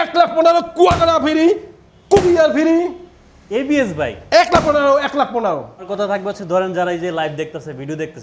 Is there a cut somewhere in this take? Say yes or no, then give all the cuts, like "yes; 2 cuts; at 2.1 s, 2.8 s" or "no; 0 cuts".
no; 0 cuts